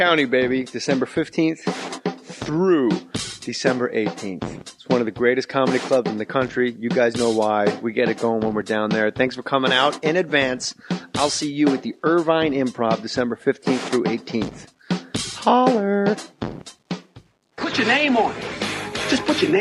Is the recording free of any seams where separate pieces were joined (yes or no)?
yes